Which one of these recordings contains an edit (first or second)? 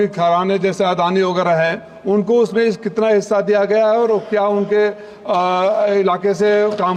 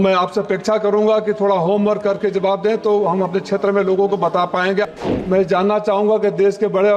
second